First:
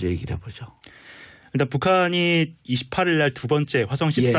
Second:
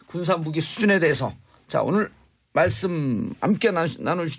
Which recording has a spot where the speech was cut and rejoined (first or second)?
first